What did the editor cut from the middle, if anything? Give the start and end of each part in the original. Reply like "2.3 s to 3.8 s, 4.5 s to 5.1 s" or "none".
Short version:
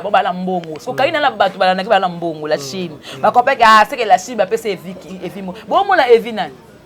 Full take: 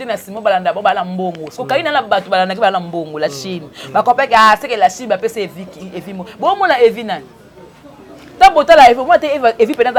none